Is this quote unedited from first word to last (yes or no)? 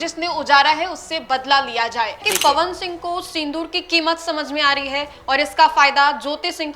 no